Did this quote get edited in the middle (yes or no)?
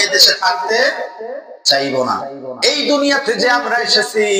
yes